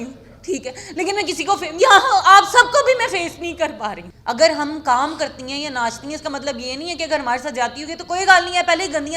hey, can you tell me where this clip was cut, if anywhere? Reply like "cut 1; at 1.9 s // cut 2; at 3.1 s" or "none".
cut 1; at 4.1 s

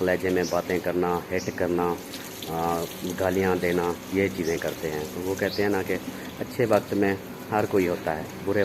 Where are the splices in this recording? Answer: none

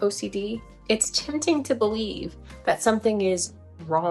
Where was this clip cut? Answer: none

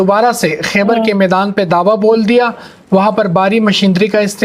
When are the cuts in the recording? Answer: none

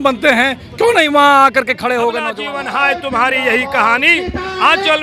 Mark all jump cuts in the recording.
cut 1; at 2.3 s

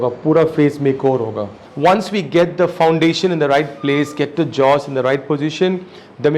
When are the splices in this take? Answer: cut 1; at 1.6 s

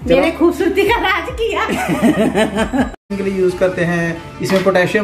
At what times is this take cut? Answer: cut 1; at 3.1 s

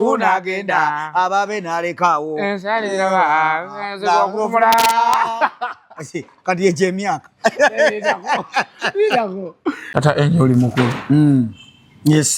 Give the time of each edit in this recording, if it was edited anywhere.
cut 1; at 9.8 s

